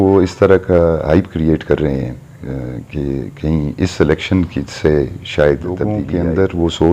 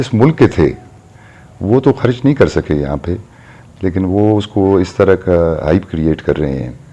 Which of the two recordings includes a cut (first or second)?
first